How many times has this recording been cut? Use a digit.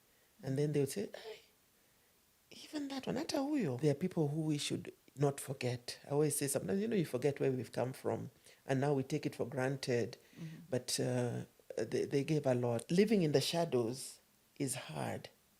2